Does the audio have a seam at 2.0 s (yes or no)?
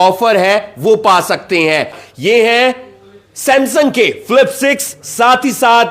yes